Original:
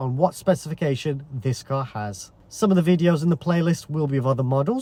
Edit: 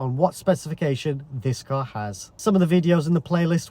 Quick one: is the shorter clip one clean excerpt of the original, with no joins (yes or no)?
no